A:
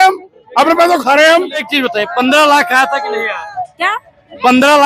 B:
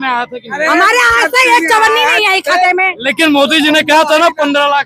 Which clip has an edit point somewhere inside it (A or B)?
A